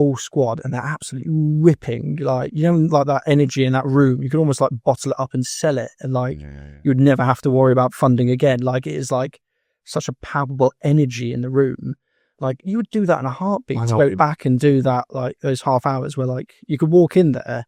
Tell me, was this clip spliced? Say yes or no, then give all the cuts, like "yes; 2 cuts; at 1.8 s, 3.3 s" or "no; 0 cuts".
no; 0 cuts